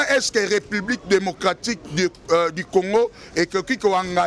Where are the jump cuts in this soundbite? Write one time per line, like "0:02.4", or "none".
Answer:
none

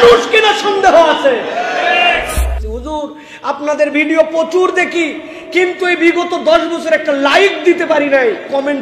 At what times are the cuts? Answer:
0:02.7

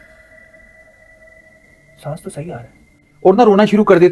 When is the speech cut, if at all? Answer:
0:03.1

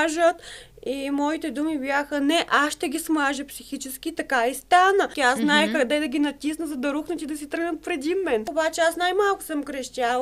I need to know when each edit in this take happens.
0:05.1
0:08.5

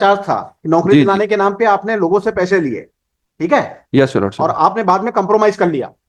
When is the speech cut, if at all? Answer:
none

